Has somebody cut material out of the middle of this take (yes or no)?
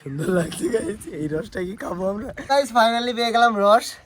yes